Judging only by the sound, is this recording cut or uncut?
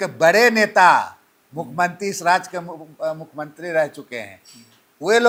uncut